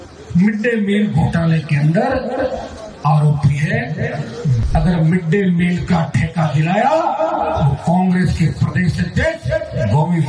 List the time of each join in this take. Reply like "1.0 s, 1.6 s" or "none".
4.6 s